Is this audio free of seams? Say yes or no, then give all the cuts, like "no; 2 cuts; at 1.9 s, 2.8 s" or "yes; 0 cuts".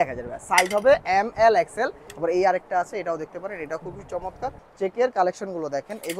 no; 2 cuts; at 2.1 s, 4.6 s